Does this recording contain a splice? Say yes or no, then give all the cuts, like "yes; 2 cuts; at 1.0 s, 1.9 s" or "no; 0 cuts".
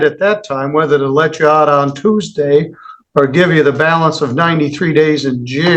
no; 0 cuts